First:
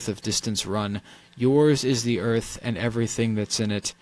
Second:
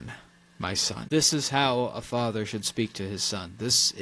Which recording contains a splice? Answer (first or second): second